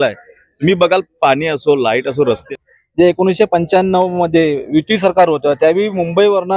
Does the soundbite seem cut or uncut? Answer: cut